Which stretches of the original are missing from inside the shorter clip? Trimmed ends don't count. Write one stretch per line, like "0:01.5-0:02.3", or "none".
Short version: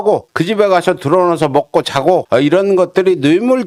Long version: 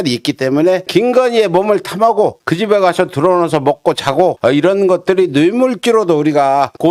none